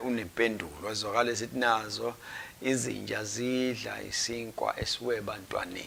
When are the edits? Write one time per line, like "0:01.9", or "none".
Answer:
none